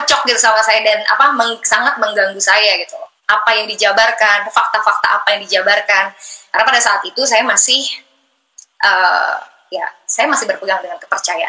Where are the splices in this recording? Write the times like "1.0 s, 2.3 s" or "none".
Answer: none